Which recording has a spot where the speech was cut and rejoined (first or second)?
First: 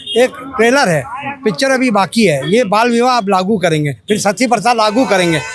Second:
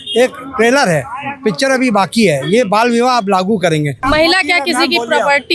second